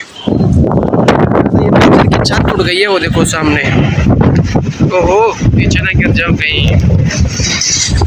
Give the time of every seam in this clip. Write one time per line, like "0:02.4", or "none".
none